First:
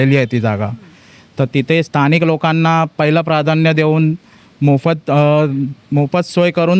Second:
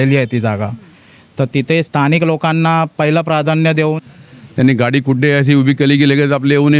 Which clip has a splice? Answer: second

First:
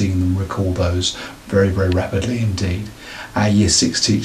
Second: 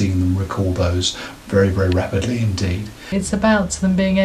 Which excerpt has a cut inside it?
second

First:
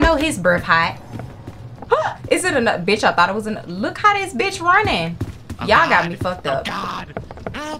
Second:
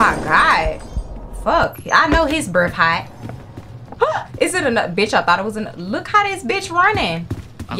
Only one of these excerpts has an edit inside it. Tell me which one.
first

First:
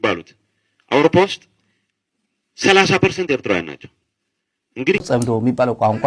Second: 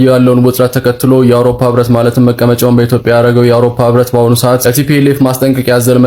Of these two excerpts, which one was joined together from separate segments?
first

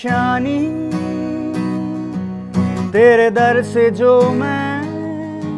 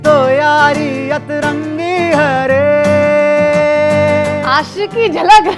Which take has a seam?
second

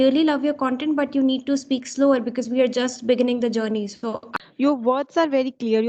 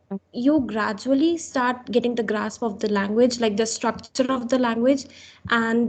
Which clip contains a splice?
first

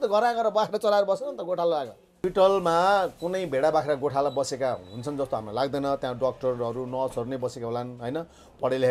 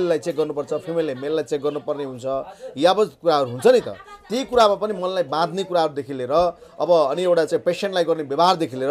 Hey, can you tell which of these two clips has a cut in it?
first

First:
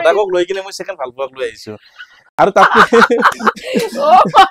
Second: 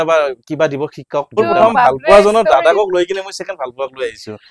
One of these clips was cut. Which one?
second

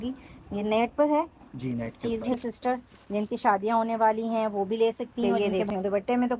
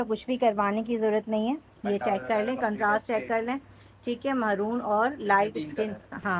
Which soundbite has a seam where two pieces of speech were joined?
first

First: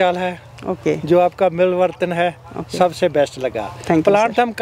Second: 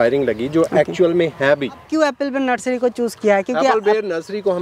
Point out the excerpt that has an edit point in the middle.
second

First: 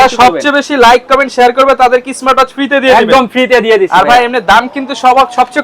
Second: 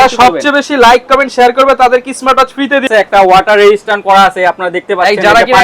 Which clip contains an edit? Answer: second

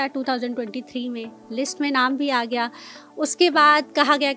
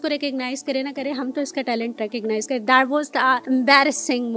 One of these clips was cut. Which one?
second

